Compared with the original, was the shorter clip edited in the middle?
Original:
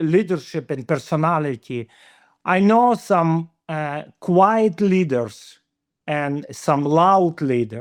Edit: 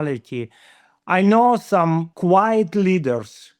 yes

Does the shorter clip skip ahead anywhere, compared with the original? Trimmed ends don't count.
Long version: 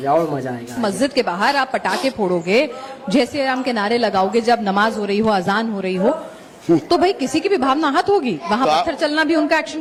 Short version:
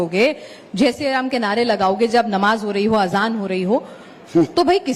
no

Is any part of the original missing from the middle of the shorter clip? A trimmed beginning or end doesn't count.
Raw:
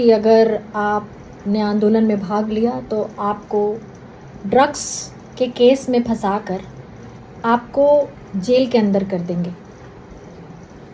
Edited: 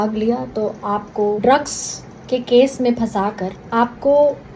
yes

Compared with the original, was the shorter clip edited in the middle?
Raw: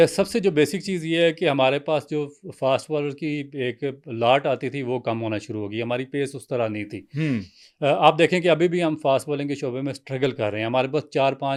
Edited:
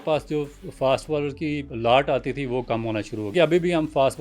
yes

